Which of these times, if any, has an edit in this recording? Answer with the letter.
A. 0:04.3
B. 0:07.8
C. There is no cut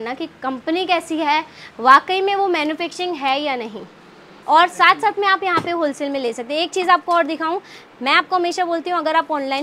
A